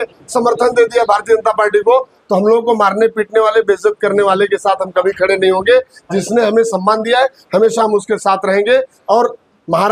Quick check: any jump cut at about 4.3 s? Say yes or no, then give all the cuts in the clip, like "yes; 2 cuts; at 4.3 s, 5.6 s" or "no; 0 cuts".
no; 0 cuts